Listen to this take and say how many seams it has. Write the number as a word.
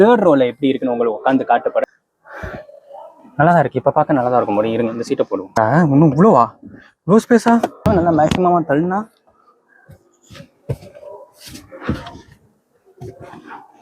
three